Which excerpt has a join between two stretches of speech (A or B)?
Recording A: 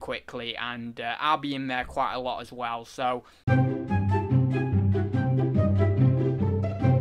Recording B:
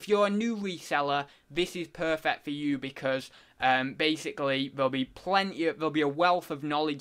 A